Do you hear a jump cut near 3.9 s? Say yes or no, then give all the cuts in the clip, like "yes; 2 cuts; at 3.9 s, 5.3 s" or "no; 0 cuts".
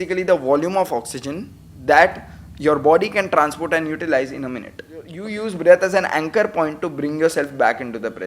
no; 1 cut; at 5.2 s